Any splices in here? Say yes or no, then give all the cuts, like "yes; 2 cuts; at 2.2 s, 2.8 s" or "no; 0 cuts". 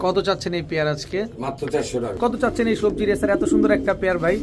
yes; 1 cut; at 2.2 s